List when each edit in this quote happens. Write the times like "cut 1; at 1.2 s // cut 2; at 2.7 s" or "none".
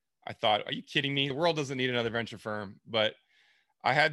cut 1; at 1.3 s